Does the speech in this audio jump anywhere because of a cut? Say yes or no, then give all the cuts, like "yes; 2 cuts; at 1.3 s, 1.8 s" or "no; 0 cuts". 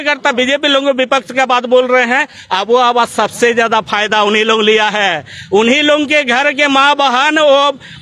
no; 0 cuts